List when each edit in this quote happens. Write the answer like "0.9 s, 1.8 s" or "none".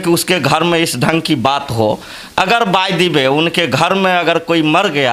none